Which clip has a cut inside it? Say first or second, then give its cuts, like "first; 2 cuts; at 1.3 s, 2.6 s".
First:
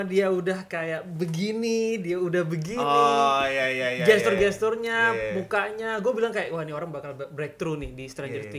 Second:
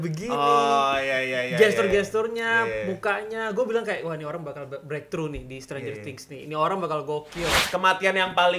second; 1 cut; at 7.6 s